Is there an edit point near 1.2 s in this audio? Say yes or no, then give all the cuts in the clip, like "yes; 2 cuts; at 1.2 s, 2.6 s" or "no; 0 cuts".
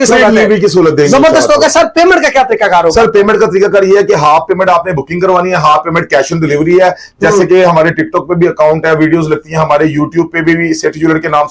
no; 0 cuts